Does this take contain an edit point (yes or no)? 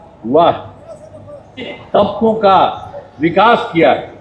yes